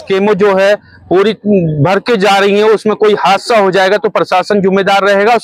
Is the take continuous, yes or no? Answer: yes